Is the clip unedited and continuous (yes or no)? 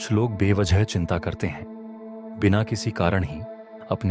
yes